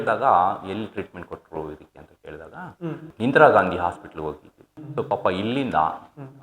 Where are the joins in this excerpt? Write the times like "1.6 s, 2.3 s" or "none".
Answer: 3.1 s, 4.7 s